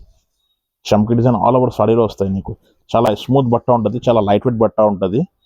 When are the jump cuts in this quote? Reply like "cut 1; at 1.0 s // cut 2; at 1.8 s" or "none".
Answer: none